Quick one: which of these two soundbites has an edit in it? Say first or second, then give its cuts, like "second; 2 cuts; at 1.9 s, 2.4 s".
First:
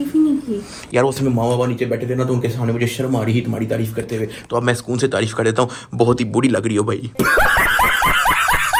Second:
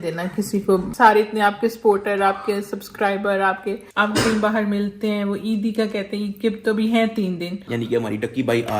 second; 3 cuts; at 0.9 s, 3.9 s, 7.5 s